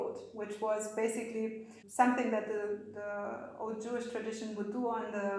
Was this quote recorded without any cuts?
yes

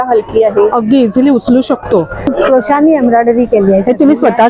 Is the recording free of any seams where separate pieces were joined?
no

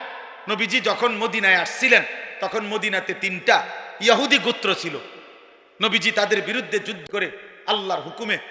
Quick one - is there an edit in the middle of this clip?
yes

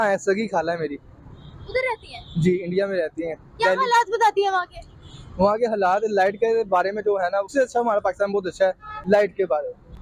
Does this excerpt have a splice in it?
no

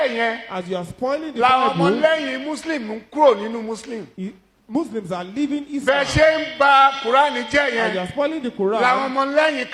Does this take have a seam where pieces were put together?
no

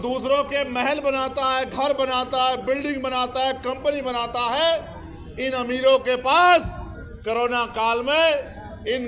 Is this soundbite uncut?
yes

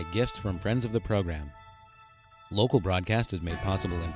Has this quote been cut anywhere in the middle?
no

